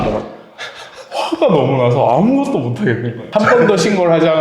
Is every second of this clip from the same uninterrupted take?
no; 1 cut; at 3.1 s

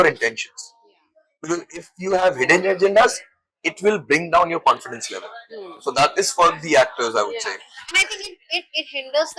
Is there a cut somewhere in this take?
no; 0 cuts

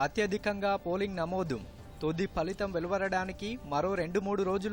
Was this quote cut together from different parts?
no; 0 cuts

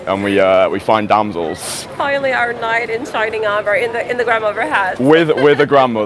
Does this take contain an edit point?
no; 0 cuts

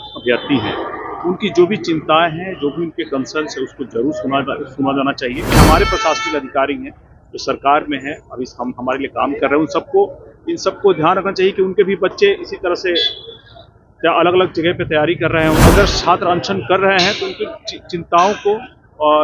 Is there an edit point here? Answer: yes; 2 cuts; at 5.5 s, 15.6 s

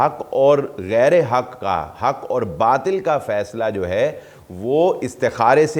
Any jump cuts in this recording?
no; 0 cuts

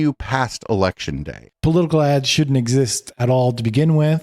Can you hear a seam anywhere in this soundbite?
yes; 1 cut; at 1.4 s

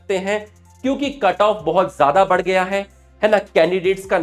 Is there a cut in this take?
no; 0 cuts

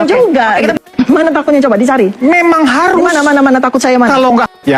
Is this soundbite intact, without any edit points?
yes; 0 cuts

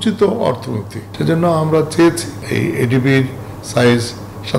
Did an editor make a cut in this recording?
yes; 2 cuts; at 1.1 s, 2.3 s

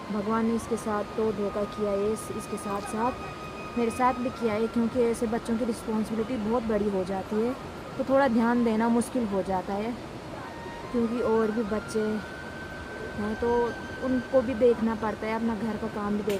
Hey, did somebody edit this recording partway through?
no; 0 cuts

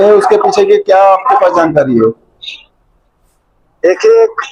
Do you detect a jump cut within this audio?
no; 0 cuts

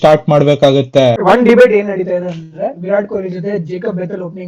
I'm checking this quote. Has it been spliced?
yes; 1 cut; at 1.2 s

